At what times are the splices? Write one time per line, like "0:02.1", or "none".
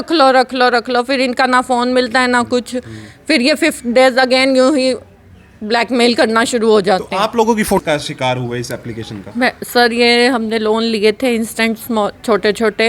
0:07.8